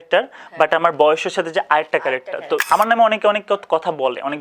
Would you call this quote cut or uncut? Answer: cut